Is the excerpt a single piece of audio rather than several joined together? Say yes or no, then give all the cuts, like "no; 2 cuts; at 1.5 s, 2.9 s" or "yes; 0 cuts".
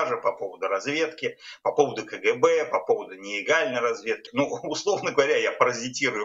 no; 1 cut; at 4.2 s